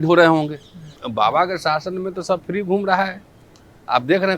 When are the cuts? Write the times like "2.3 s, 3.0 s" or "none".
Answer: 1.0 s